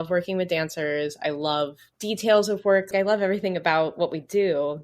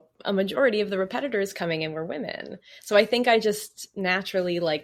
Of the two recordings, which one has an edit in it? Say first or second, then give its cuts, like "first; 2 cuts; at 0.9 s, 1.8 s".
first; 1 cut; at 1.9 s